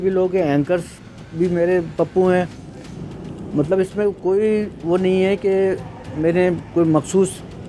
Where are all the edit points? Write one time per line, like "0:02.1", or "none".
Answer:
none